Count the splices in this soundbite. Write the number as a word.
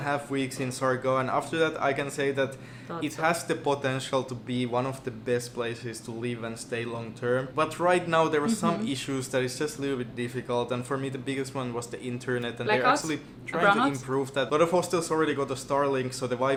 zero